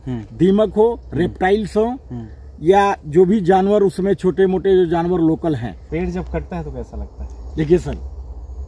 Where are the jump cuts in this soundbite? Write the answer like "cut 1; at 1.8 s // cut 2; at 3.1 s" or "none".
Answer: cut 1; at 5.8 s